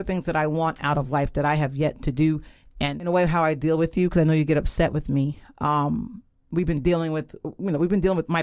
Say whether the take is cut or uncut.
cut